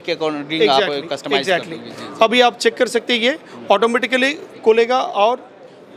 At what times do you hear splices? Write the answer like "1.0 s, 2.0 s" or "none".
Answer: none